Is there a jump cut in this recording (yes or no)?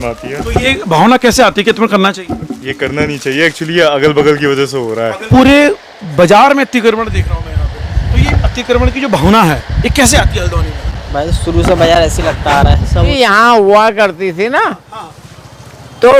yes